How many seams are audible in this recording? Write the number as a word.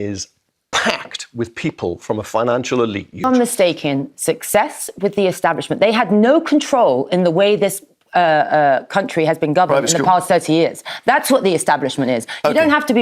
one